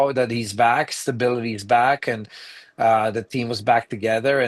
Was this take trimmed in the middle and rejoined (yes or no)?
no